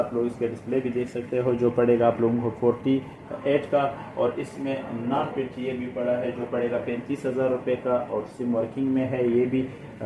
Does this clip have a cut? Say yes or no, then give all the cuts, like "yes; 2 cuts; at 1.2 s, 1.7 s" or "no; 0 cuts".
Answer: no; 0 cuts